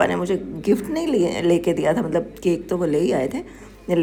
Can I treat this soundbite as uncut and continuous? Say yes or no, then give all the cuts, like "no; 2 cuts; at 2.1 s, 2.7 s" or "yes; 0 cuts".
yes; 0 cuts